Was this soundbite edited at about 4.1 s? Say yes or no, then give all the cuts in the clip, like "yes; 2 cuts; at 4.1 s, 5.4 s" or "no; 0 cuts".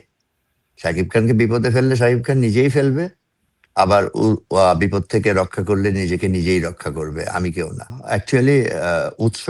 no; 1 cut; at 7.9 s